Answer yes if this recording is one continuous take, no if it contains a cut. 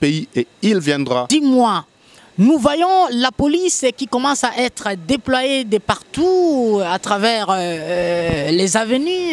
no